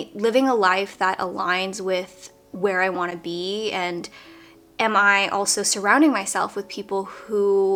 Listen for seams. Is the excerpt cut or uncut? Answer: uncut